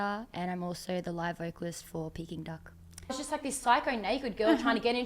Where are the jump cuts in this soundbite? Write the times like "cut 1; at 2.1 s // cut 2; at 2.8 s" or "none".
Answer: cut 1; at 3.1 s